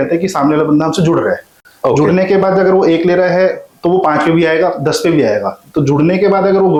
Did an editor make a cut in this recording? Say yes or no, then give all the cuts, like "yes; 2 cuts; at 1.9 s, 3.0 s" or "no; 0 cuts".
no; 0 cuts